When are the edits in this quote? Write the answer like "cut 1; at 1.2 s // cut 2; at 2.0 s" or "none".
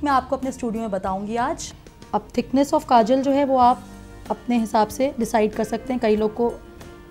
cut 1; at 1.8 s

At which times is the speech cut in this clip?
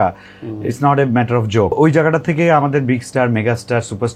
cut 1; at 1.7 s

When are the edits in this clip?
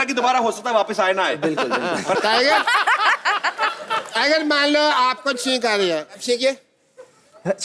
cut 1; at 2.2 s

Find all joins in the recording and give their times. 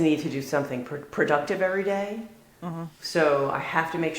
none

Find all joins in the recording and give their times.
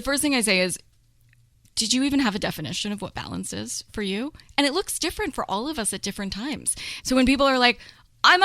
cut 1; at 6.9 s

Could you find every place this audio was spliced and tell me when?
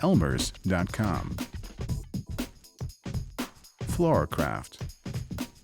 cut 1; at 1.7 s // cut 2; at 4.0 s // cut 3; at 4.7 s

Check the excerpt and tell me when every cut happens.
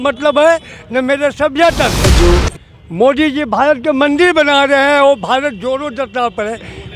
none

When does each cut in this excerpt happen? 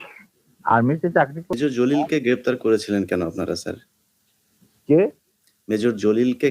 cut 1; at 1.6 s

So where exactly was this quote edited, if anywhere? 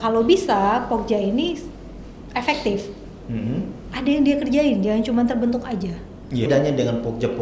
cut 1; at 6.5 s

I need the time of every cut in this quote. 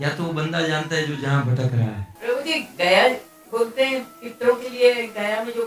cut 1; at 2.1 s

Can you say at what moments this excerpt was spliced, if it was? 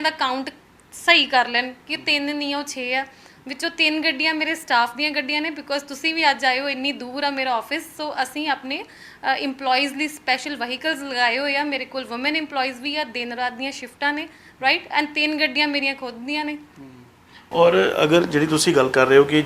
none

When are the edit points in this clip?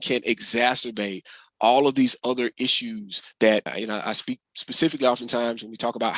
cut 1; at 3.7 s

